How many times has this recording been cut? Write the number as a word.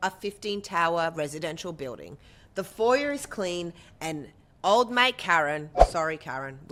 zero